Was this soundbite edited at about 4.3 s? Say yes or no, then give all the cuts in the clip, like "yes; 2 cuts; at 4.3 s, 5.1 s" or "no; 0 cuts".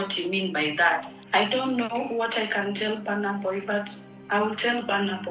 no; 1 cut; at 1.1 s